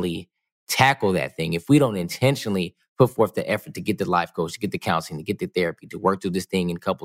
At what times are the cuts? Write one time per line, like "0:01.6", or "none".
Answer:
none